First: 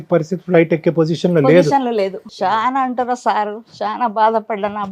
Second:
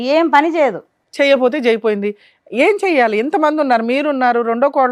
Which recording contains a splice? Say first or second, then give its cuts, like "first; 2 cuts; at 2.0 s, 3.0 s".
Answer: first; 1 cut; at 2.2 s